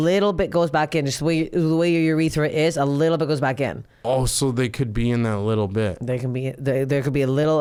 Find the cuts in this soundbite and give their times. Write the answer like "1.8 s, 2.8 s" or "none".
none